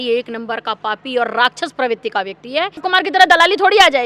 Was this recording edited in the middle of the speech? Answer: yes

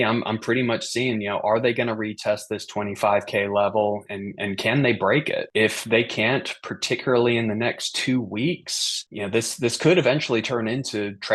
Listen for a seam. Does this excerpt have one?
no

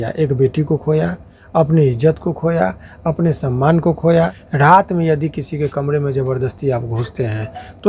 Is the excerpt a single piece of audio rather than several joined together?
no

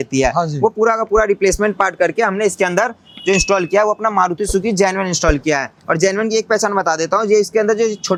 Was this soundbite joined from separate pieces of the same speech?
no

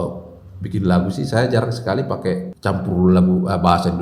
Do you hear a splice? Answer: yes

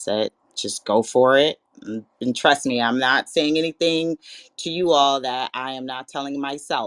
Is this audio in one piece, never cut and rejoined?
yes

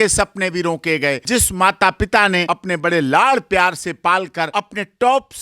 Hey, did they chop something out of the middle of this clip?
yes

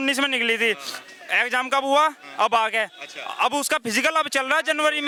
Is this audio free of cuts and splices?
yes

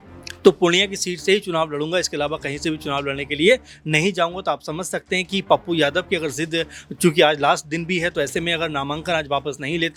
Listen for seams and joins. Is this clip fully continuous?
yes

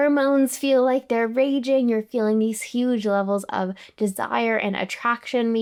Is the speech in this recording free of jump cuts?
yes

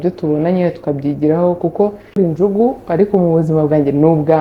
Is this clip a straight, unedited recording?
no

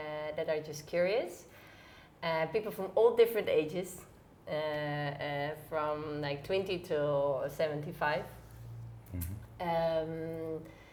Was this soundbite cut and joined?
no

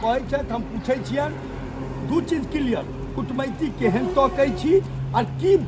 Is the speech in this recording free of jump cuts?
yes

